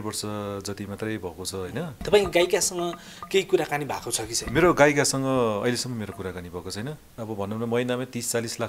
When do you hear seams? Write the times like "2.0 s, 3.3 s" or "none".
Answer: 2.0 s, 7.2 s